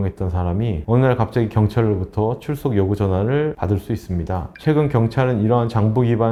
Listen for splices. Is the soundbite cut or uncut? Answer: uncut